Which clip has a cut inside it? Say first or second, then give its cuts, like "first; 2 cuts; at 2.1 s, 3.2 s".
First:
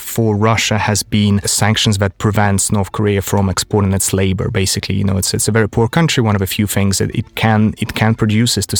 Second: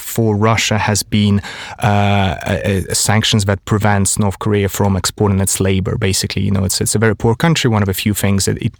first; 1 cut; at 1.5 s